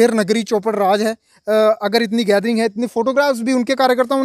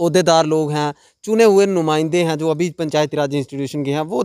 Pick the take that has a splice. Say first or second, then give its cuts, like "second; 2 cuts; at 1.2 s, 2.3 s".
first; 1 cut; at 1.2 s